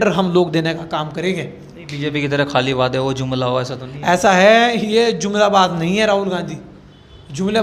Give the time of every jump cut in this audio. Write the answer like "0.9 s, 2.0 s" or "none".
none